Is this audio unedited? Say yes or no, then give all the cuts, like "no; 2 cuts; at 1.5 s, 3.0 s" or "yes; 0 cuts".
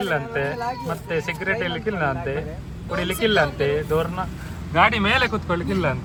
yes; 0 cuts